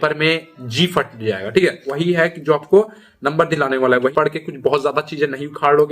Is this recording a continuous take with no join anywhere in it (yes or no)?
no